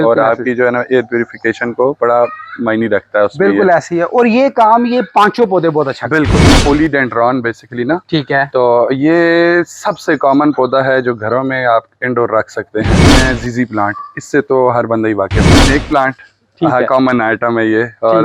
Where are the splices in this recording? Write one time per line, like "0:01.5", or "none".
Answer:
0:06.6
0:13.1
0:15.6